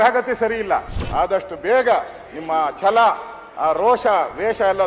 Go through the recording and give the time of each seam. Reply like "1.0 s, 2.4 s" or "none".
1.0 s